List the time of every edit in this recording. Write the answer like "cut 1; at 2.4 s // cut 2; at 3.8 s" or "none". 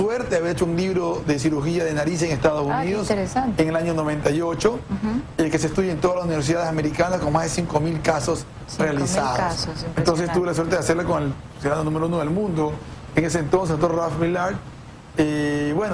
cut 1; at 11.1 s